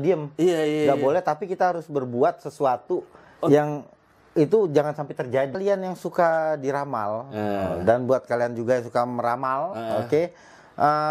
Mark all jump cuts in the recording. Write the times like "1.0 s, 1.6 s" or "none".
5.6 s

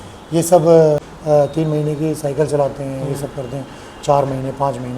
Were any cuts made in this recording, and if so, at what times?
1.1 s

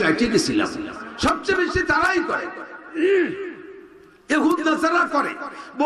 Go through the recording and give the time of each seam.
1.0 s

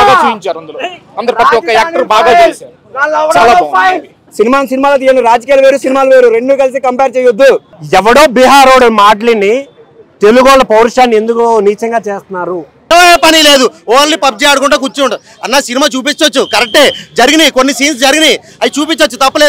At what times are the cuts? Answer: 4.2 s, 7.7 s, 12.9 s

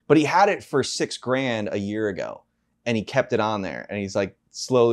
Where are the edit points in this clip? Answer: none

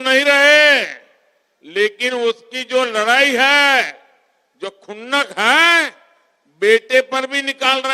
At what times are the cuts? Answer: none

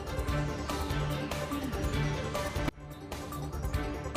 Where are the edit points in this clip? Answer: none

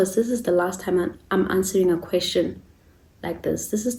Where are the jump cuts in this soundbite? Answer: none

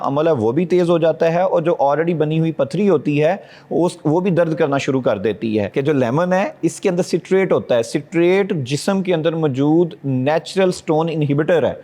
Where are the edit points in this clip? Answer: 5.7 s

